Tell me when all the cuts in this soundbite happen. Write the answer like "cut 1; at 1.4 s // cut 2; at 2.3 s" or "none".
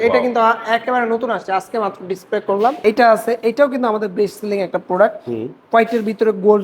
cut 1; at 2.8 s